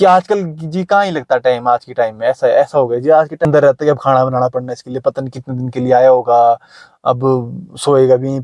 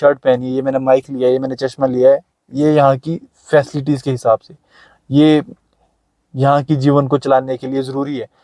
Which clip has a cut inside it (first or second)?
first